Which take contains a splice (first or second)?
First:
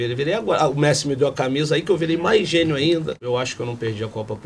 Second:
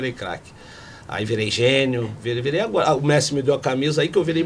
first